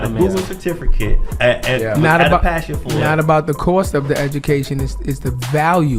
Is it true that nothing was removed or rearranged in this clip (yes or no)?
no